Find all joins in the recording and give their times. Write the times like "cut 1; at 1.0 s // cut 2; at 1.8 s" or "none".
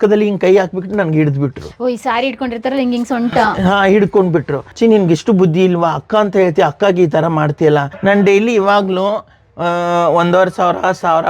cut 1; at 4.6 s // cut 2; at 7.9 s